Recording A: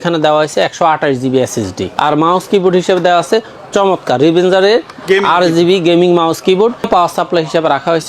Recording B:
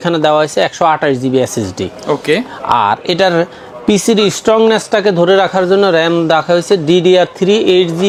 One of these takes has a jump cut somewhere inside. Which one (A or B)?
A